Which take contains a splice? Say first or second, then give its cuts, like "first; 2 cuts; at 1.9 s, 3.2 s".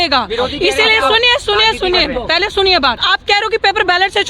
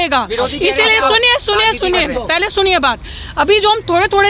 first; 1 cut; at 3.1 s